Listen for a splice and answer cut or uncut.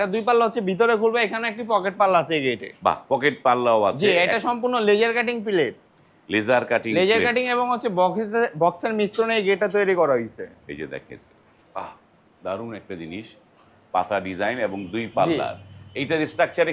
uncut